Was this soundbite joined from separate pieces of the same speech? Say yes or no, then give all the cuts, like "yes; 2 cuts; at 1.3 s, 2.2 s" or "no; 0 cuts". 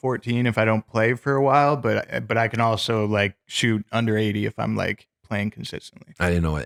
no; 0 cuts